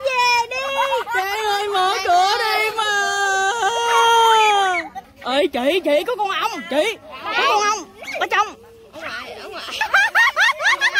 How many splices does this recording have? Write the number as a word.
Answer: two